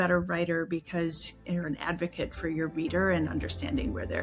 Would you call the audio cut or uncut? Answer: uncut